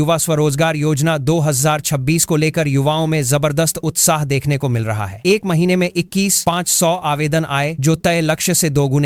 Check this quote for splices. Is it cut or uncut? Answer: uncut